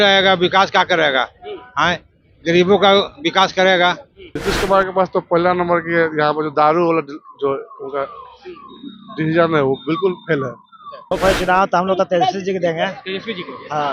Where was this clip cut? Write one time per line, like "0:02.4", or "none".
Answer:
0:04.3
0:11.0